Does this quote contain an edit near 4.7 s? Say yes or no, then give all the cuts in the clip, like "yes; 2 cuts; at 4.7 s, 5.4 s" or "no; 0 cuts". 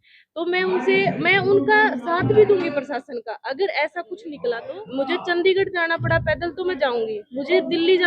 yes; 1 cut; at 4.7 s